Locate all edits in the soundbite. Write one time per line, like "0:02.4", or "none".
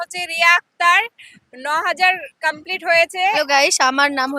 0:03.4